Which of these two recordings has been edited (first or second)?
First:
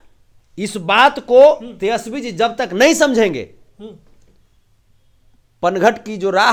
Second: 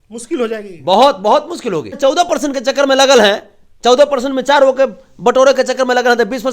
second